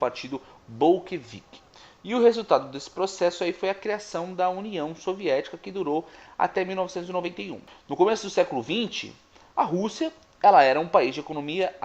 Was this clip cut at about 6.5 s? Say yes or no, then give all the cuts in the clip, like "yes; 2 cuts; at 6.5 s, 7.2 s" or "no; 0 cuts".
no; 1 cut; at 9.8 s